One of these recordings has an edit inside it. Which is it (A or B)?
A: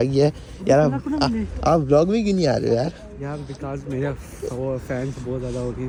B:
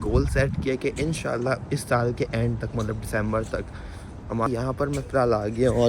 B